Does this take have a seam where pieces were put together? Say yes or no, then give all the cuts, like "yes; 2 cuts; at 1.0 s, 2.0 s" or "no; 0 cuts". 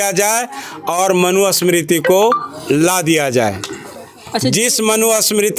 no; 0 cuts